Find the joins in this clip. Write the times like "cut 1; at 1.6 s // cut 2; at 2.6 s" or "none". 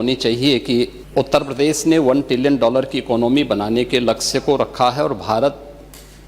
cut 1; at 1.0 s